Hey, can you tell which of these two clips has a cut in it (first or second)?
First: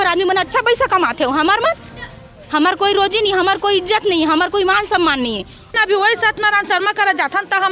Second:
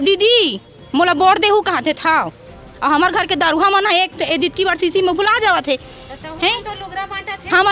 first